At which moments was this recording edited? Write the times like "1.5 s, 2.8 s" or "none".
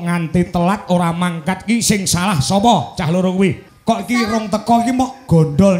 3.7 s